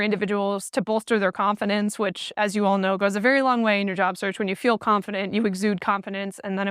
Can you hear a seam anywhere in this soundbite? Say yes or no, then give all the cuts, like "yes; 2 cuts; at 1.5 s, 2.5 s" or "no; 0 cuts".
no; 0 cuts